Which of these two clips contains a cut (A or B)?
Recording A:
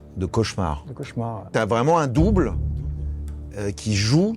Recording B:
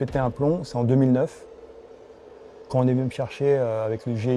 A